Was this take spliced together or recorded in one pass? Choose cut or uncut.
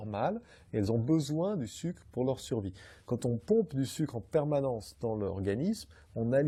uncut